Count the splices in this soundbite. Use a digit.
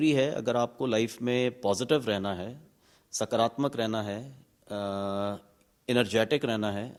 0